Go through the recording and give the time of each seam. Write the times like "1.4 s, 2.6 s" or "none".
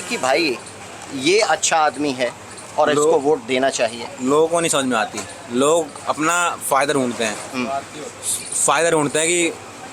none